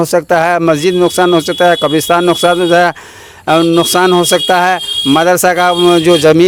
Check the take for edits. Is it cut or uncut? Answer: uncut